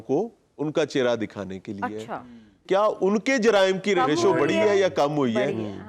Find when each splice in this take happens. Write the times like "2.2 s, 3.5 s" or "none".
2.6 s, 4.0 s